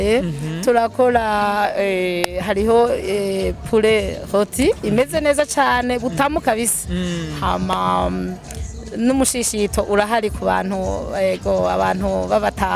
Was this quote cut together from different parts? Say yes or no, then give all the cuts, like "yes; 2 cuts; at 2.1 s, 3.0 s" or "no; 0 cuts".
no; 0 cuts